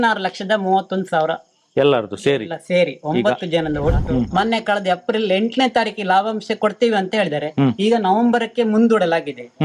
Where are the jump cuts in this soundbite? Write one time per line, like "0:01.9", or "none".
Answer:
0:04.0